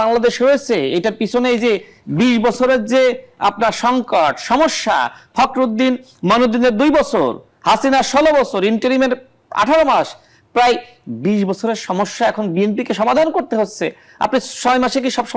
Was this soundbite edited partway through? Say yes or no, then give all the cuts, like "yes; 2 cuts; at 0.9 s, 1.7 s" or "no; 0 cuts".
no; 0 cuts